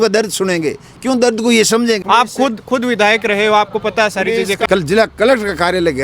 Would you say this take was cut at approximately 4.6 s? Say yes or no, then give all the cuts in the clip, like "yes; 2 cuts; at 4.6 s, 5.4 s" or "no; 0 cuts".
yes; 2 cuts; at 2.0 s, 4.6 s